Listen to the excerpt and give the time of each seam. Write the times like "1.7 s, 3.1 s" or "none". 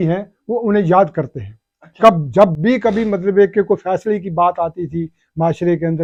none